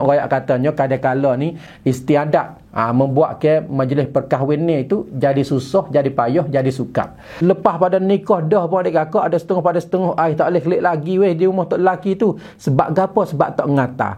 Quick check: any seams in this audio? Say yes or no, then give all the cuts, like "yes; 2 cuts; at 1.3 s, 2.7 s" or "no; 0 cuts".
yes; 1 cut; at 7.3 s